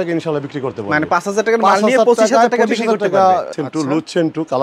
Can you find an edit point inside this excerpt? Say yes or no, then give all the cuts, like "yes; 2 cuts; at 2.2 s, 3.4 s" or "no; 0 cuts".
yes; 1 cut; at 3.5 s